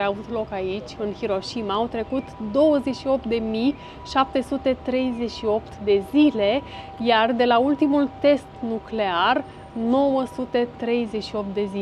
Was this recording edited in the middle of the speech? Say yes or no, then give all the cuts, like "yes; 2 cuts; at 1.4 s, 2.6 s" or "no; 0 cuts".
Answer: no; 0 cuts